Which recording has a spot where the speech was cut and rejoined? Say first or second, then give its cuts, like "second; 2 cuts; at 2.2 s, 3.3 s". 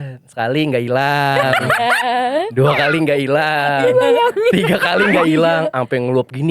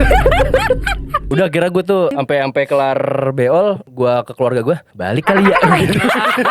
second; 4 cuts; at 1.2 s, 2.1 s, 3.9 s, 4.9 s